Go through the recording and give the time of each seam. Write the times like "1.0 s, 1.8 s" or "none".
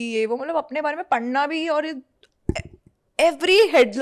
none